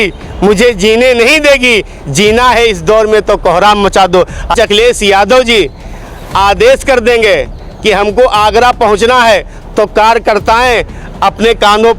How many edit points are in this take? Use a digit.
1